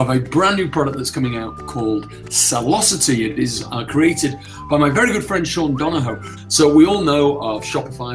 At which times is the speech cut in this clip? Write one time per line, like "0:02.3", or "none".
0:06.3